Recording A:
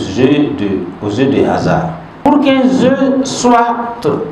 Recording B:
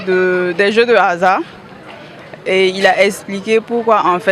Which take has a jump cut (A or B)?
A